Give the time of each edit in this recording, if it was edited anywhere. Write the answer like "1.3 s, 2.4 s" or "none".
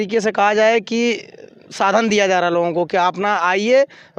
none